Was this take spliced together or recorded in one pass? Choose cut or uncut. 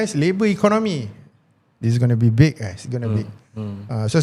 uncut